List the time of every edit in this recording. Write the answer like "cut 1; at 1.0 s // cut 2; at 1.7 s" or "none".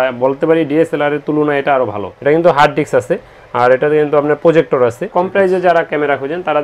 cut 1; at 2.1 s // cut 2; at 5.1 s